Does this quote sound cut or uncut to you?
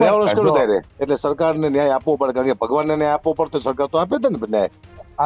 cut